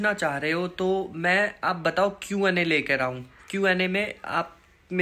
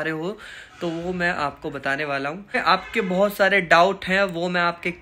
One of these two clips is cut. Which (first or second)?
second